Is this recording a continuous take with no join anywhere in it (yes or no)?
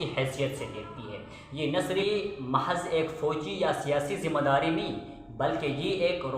no